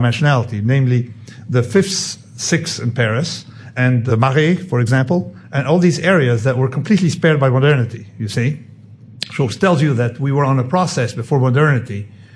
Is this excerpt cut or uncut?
cut